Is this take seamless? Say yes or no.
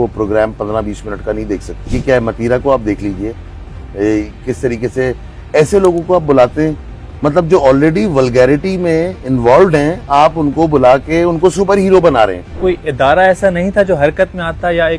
no